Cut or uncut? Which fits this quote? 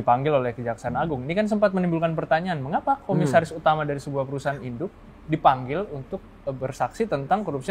uncut